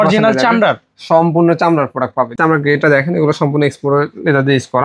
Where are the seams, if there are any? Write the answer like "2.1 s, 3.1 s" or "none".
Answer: 2.4 s

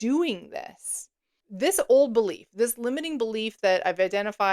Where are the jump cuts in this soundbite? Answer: 1.4 s

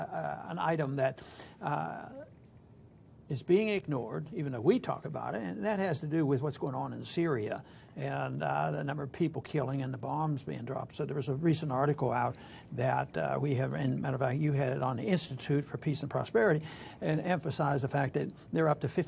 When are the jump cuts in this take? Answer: 3.2 s

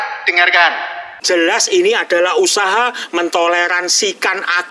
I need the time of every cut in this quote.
1.1 s

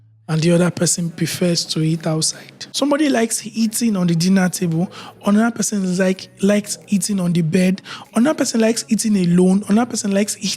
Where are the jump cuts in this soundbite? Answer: 2.6 s

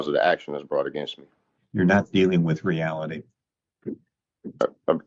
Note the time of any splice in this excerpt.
1.2 s

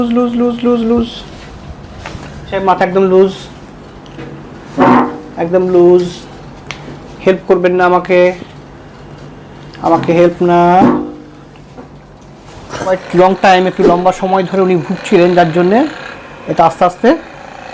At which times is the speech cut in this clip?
2.4 s, 12.9 s

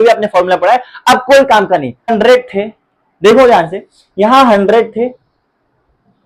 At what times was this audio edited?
2.1 s

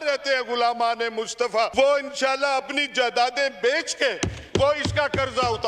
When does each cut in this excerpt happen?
1.7 s

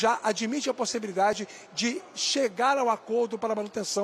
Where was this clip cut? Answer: none

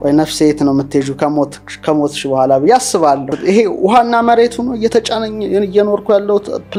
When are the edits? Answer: none

